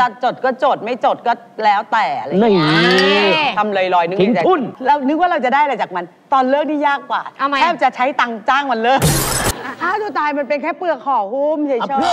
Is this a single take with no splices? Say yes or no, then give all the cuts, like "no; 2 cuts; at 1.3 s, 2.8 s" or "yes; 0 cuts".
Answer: no; 2 cuts; at 4.7 s, 9.5 s